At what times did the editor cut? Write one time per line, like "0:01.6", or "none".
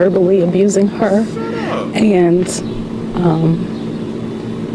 none